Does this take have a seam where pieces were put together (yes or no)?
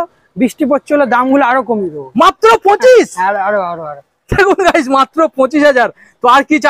no